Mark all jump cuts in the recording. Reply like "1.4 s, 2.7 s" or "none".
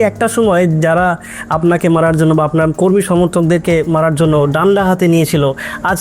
2.7 s